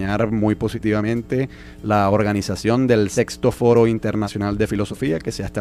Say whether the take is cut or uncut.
uncut